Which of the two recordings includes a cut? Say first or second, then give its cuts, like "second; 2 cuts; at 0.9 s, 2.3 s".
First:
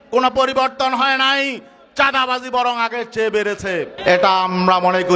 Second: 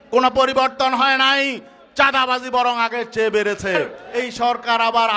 second; 1 cut; at 3.9 s